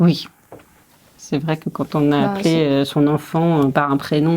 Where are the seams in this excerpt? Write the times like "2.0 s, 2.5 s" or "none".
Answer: 0.9 s